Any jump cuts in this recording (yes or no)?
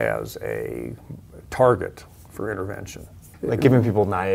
yes